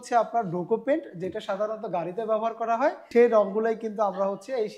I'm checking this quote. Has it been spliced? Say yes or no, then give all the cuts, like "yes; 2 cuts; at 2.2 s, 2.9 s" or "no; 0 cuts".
yes; 1 cut; at 3.0 s